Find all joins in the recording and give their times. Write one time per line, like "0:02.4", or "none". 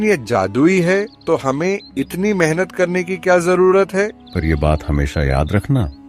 0:01.1
0:04.2

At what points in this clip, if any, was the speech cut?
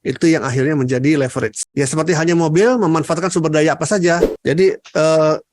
0:04.3

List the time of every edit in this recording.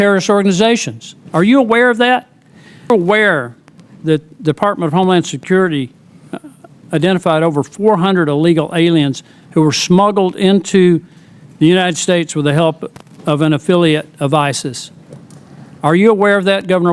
0:02.9

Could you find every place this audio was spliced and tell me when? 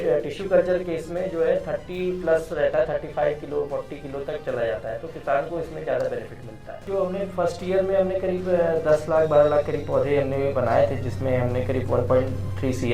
0:06.8

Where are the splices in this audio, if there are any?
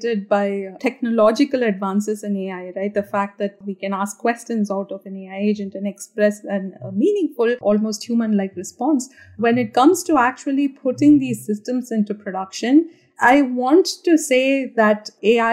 0:00.8
0:03.6
0:07.6

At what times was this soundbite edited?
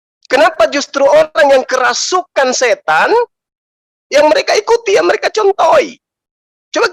none

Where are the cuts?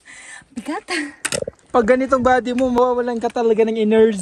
0:01.6
0:02.8

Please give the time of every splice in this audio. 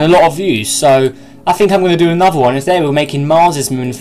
none

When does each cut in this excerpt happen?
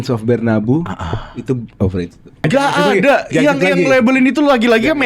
0:02.4

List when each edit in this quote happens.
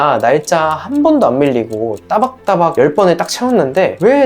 none

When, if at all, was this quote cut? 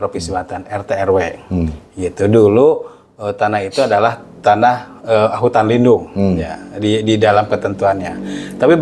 none

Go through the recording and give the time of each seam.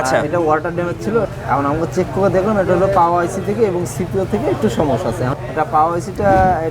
0:01.3
0:05.3

